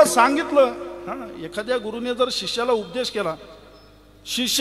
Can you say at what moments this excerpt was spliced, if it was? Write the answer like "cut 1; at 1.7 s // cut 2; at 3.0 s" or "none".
none

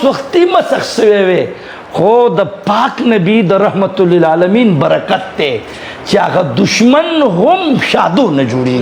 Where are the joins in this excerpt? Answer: none

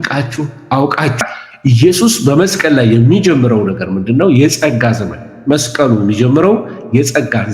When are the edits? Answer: cut 1; at 1.2 s

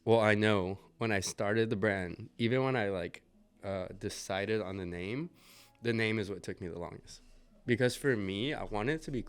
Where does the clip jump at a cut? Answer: none

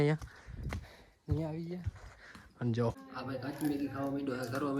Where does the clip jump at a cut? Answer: cut 1; at 3.1 s

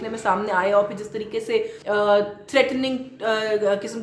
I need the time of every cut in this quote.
cut 1; at 1.8 s

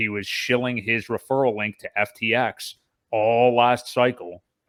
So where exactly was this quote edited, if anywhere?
none

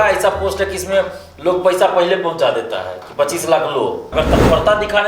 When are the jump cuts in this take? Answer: cut 1; at 4.0 s

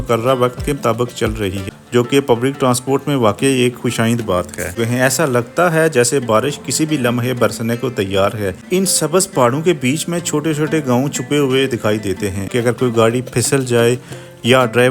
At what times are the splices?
cut 1; at 1.7 s // cut 2; at 4.7 s // cut 3; at 8.6 s // cut 4; at 12.5 s

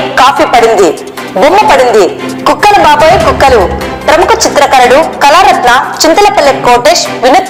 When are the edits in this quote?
none

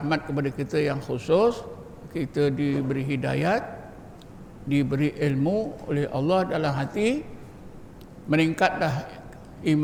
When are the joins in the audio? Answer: none

